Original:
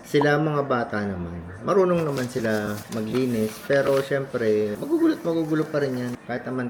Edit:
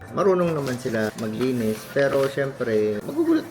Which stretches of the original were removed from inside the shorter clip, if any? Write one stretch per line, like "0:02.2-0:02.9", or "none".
0:02.6-0:02.9